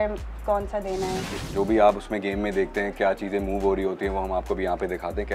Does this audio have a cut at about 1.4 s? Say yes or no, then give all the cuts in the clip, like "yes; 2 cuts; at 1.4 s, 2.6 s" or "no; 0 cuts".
yes; 1 cut; at 1.4 s